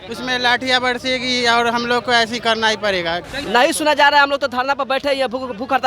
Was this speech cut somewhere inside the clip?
yes; 1 cut; at 3.3 s

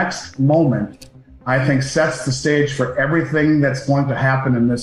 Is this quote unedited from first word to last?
yes; 0 cuts

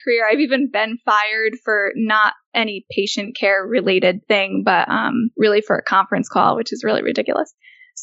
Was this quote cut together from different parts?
yes; 2 cuts; at 4.2 s, 5.3 s

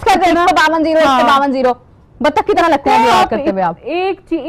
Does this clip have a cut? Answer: no; 0 cuts

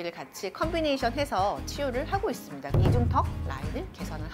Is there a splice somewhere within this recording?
yes; 1 cut; at 2.6 s

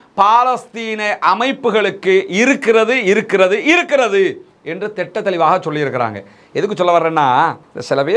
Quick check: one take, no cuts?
yes; 0 cuts

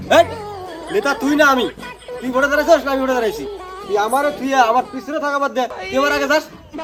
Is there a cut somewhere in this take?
no; 0 cuts

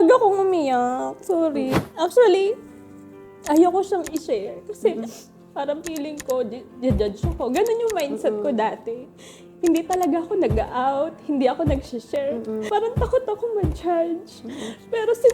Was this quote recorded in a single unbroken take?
no; 1 cut; at 1.7 s

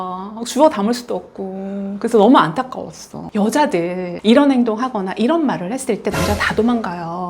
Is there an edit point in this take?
yes; 1 cut; at 3.3 s

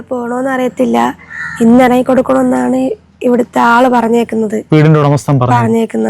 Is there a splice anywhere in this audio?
no; 0 cuts

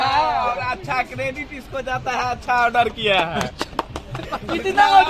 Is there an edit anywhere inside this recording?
no; 0 cuts

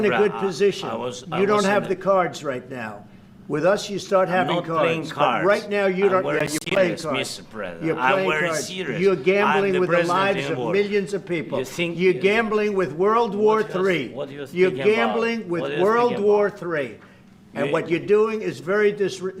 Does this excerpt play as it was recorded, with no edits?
yes; 0 cuts

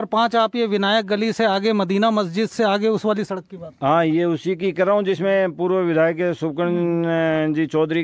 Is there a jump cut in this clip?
no; 0 cuts

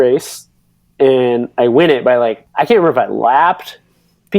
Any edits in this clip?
yes; 1 cut; at 2.4 s

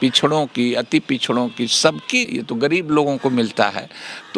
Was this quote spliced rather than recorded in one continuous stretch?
yes; 1 cut; at 2.3 s

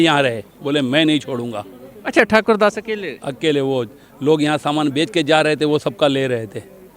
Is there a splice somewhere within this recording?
no; 0 cuts

